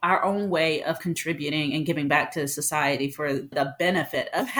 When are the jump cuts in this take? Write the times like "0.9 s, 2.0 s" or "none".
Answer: 3.5 s